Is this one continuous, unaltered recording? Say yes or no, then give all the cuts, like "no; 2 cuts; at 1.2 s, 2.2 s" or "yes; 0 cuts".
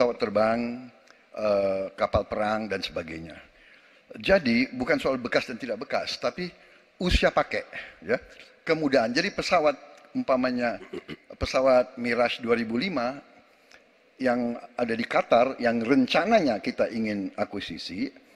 yes; 0 cuts